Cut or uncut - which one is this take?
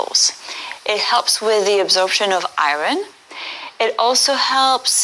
cut